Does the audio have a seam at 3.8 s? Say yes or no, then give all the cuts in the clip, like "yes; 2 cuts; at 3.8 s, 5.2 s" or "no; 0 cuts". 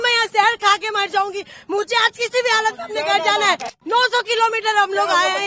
yes; 1 cut; at 3.8 s